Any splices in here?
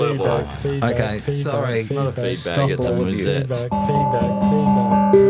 no; 0 cuts

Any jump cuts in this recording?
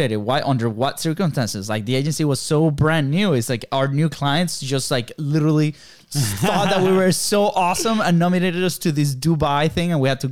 no; 0 cuts

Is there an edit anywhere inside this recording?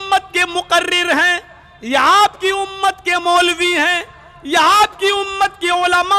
no; 0 cuts

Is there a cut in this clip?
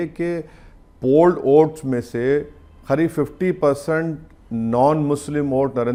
no; 0 cuts

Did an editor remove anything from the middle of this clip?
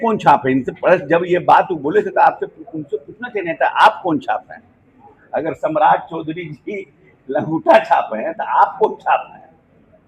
no; 0 cuts

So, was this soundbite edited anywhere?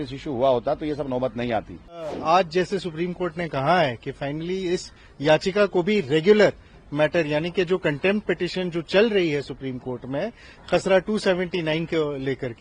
yes; 1 cut; at 2.1 s

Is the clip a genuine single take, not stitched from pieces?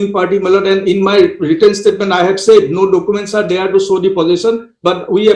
yes; 0 cuts

